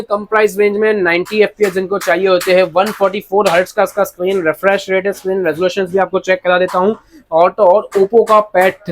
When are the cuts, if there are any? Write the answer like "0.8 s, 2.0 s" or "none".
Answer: none